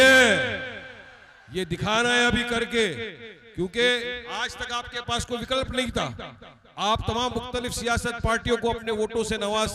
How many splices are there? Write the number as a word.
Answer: zero